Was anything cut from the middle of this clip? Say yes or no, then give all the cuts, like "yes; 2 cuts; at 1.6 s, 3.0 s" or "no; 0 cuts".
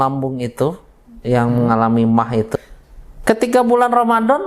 yes; 1 cut; at 2.5 s